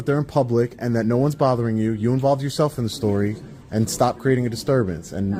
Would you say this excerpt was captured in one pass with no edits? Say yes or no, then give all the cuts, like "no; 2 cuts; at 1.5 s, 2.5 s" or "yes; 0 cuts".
yes; 0 cuts